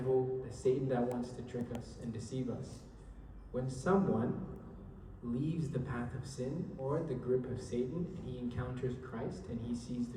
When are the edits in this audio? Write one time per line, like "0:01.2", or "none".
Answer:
none